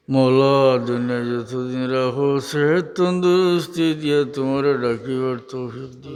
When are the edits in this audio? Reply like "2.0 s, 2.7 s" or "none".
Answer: none